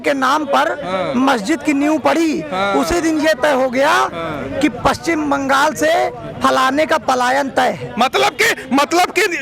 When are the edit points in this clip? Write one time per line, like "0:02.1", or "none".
none